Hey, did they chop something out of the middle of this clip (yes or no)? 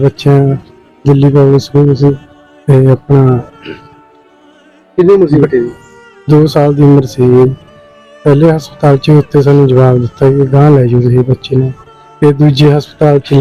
no